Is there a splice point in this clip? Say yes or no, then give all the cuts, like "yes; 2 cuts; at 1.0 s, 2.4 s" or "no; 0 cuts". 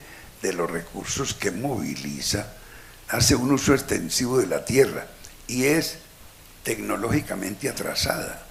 no; 0 cuts